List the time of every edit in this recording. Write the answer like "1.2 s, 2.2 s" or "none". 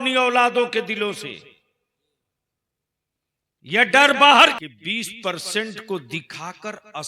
4.5 s

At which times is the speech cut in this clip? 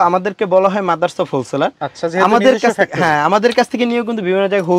none

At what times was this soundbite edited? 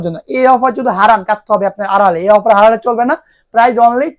none

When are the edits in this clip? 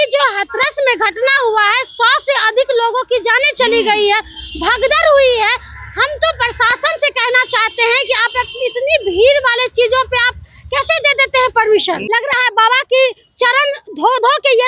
12.0 s

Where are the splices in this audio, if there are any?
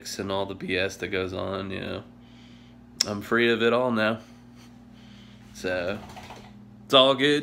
none

